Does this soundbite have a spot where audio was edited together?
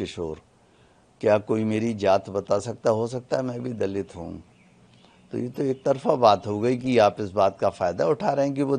no; 0 cuts

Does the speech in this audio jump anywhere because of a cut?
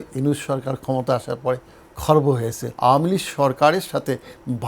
yes; 1 cut; at 2.6 s

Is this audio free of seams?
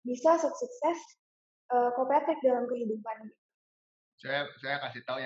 yes; 0 cuts

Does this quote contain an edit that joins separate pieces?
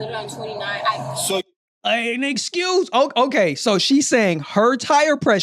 yes; 1 cut; at 1.4 s

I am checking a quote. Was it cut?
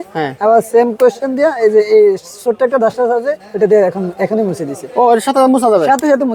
no; 0 cuts

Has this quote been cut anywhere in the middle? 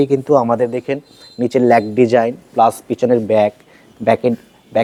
no; 0 cuts

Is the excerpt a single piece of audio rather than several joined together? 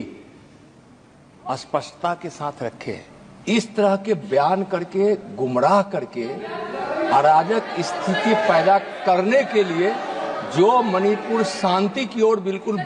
yes; 0 cuts

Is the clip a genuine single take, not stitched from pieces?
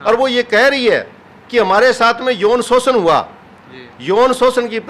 yes; 0 cuts

